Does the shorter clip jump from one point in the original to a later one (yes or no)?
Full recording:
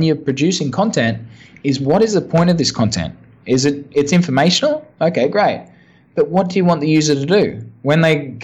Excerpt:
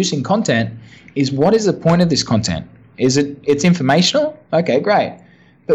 no